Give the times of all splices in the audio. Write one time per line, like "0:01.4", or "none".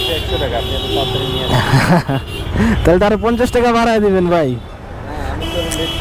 none